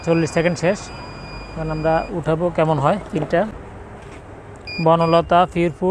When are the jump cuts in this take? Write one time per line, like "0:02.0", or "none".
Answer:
0:03.5

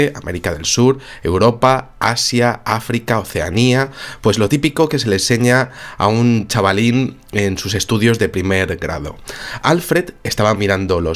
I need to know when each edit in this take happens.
0:01.9

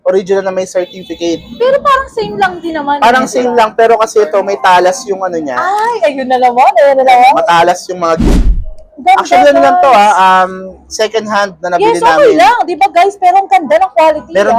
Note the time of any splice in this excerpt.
0:08.4

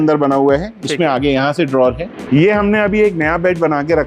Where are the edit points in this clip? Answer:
0:02.2

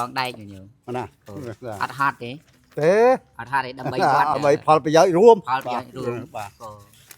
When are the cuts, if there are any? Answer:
0:02.6
0:04.3

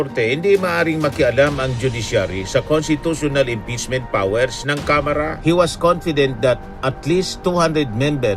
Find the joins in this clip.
0:05.3

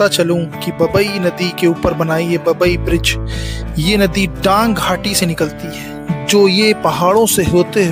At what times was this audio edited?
none

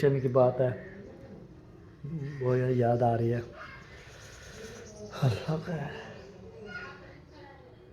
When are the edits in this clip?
0:03.6

